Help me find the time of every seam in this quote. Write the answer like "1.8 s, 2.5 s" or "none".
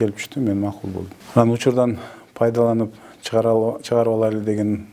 1.1 s